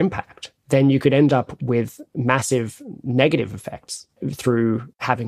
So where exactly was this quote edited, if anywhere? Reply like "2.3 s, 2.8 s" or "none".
4.3 s